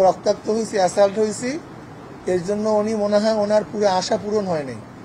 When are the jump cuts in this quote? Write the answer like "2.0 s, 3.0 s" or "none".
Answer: none